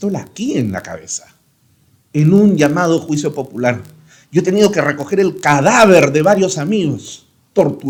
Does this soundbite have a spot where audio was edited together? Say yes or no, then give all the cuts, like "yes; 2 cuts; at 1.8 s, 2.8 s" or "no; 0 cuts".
no; 0 cuts